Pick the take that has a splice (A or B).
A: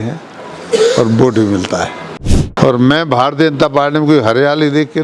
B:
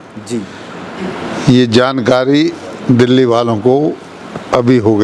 A